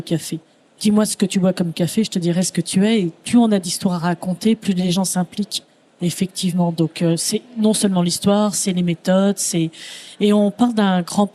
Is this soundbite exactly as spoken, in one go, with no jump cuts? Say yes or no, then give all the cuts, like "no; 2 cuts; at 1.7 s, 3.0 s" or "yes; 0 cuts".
yes; 0 cuts